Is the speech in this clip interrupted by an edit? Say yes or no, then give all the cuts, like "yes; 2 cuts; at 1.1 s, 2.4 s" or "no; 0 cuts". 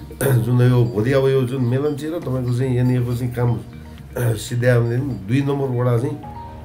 no; 0 cuts